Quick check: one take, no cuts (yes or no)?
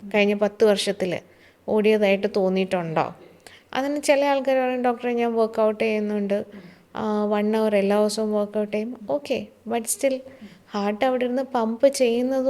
yes